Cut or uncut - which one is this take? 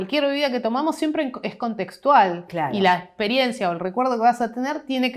uncut